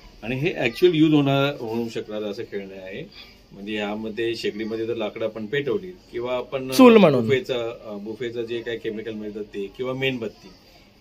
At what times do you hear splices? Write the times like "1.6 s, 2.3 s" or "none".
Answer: none